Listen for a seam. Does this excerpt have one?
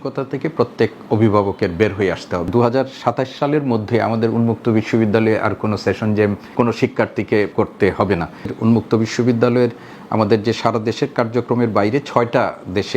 yes; 4 cuts; at 2.5 s, 6.4 s, 7.5 s, 8.5 s

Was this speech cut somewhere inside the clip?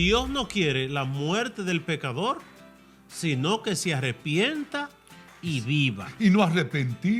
yes; 1 cut; at 6.1 s

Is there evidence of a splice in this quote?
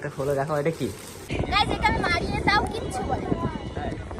yes; 1 cut; at 1.2 s

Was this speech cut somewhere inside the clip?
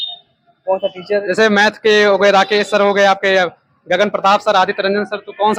no; 0 cuts

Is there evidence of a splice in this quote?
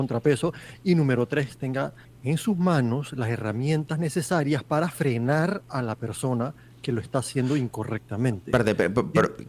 yes; 1 cut; at 2.1 s

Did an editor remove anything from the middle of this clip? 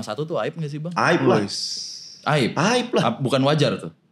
no; 0 cuts

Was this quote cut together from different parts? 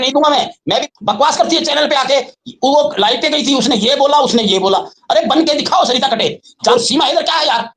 yes; 2 cuts; at 0.9 s, 6.7 s

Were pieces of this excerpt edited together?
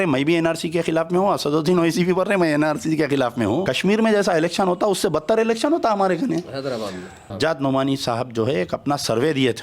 yes; 2 cuts; at 3.7 s, 7.3 s

